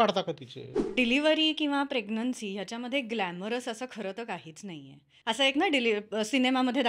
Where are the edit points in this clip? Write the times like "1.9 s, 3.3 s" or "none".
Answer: 0.9 s, 5.1 s